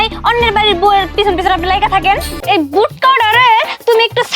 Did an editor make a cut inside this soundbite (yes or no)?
yes